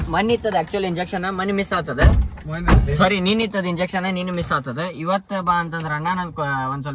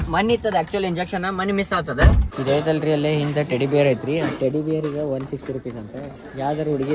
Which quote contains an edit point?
second; 1 cut; at 2.4 s

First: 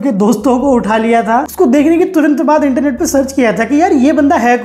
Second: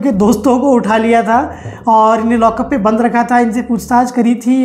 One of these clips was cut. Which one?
first; 1 cut; at 1.5 s

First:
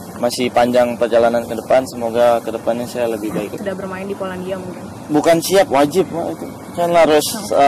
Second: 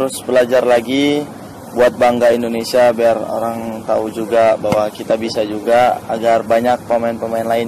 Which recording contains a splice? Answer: first; 1 cut; at 3.6 s

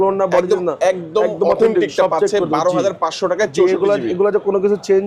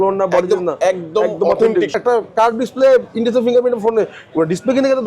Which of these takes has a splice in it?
second; 1 cut; at 1.9 s

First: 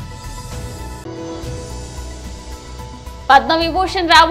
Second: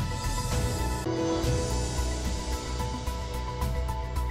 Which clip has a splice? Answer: first; 2 cuts; at 1.0 s, 3.3 s

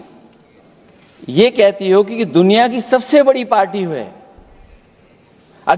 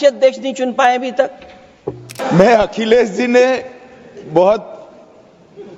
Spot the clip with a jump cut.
second; 1 cut; at 2.1 s

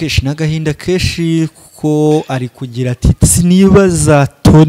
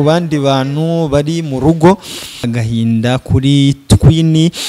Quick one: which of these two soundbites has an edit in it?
second; 1 cut; at 2.4 s

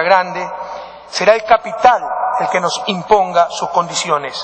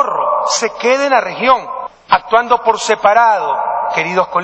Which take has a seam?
second; 1 cut; at 1.1 s

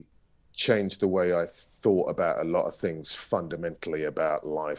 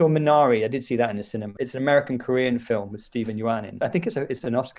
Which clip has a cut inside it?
second; 2 cuts; at 1.6 s, 3.7 s

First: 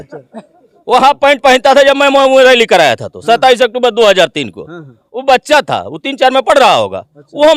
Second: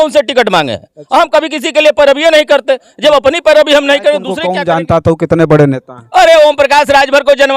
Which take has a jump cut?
second; 1 cut; at 4.5 s

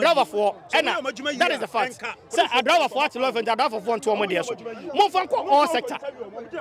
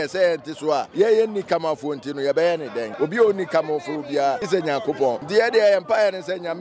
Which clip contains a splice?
second; 4 cuts; at 0.9 s, 2.8 s, 4.4 s, 5.2 s

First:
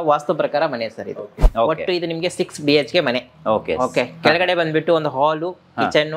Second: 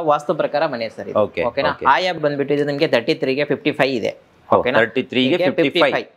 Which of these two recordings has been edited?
first; 1 cut; at 1.2 s

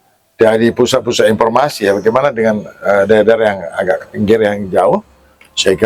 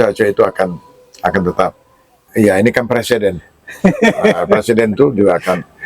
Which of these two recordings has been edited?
second; 1 cut; at 2.3 s

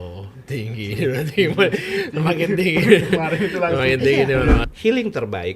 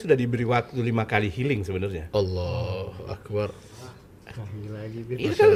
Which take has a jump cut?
first; 1 cut; at 4.6 s

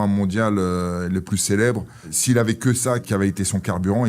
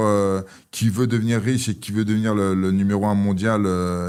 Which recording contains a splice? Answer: first; 2 cuts; at 2.1 s, 3.1 s

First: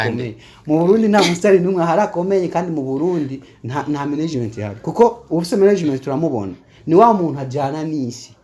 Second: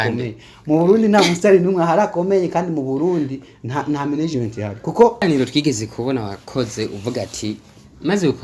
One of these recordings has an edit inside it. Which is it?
second; 1 cut; at 5.2 s

